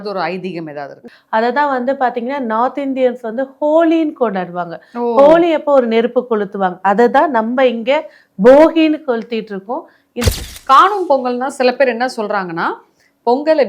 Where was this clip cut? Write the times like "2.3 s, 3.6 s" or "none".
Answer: 1.0 s, 10.3 s

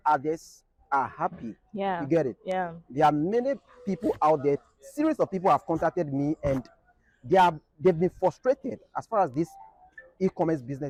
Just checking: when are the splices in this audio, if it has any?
none

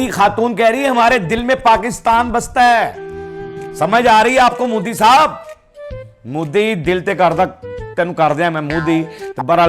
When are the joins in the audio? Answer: none

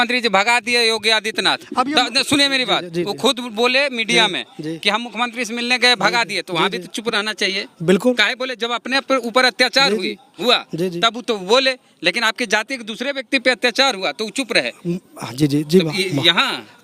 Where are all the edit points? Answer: none

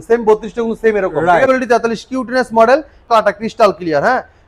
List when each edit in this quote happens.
1.5 s, 3.1 s

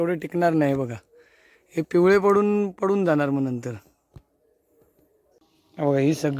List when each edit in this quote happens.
5.4 s

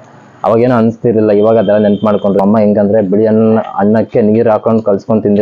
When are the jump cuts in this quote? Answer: 2.4 s

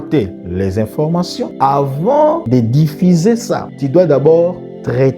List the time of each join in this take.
1.5 s, 2.4 s, 3.7 s

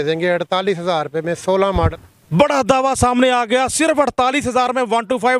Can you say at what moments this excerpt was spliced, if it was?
1.9 s

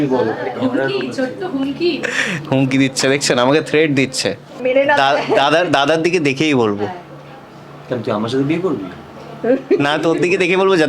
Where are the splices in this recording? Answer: 4.6 s

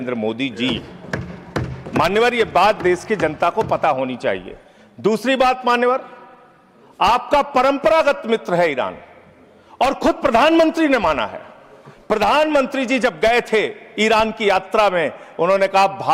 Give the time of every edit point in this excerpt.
none

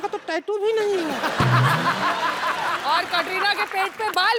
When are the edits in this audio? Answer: none

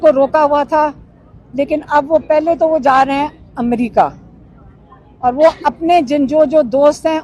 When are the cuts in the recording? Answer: none

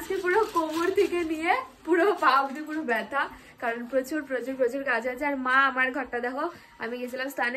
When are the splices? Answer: none

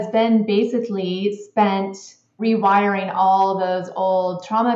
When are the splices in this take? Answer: 2.4 s

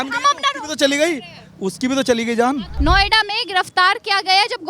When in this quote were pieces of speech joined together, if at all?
2.7 s

